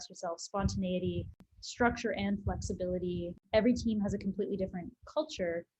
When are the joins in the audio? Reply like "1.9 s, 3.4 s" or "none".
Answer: 1.5 s, 3.4 s